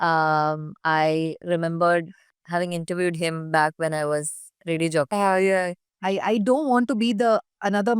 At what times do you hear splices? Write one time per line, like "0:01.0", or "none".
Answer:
0:05.9